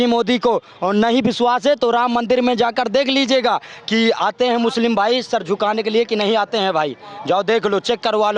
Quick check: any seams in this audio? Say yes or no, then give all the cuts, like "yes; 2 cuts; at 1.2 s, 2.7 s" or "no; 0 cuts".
no; 0 cuts